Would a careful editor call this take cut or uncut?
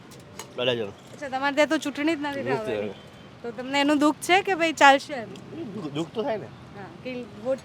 uncut